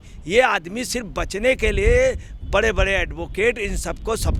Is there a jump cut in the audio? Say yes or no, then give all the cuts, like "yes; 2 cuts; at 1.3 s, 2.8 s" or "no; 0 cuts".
no; 0 cuts